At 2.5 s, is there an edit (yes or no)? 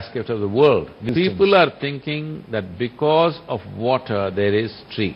no